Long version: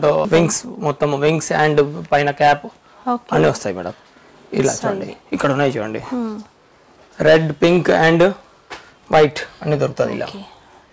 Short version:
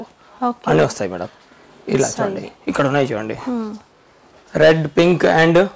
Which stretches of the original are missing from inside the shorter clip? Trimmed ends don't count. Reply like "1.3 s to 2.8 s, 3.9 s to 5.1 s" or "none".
none